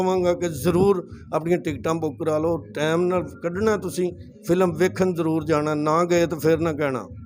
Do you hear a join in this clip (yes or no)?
no